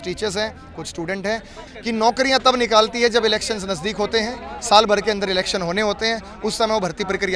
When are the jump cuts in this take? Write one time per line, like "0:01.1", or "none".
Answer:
0:01.6